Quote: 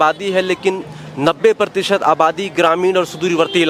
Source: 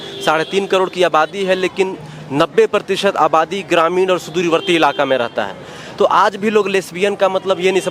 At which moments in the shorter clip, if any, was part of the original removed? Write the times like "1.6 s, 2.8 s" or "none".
none